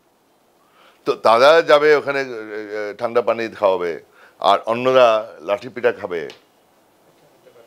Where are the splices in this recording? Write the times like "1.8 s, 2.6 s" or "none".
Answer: none